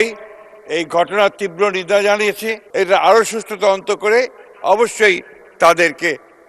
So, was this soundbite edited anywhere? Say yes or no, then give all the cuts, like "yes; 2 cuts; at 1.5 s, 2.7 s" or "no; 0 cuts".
yes; 1 cut; at 2.7 s